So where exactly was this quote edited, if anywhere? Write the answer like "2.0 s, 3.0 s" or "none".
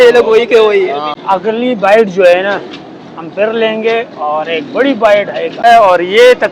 1.2 s, 5.7 s